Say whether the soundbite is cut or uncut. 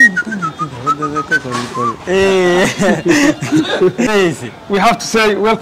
cut